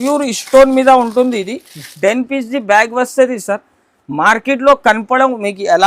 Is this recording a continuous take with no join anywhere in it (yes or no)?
yes